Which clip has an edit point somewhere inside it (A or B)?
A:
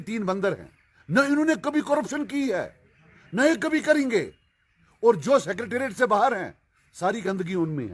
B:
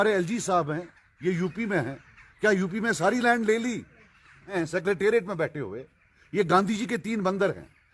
B